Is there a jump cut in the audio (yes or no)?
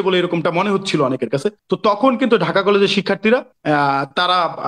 yes